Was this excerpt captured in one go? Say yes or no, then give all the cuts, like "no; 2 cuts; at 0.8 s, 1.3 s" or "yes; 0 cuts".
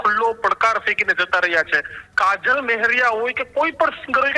no; 1 cut; at 2.0 s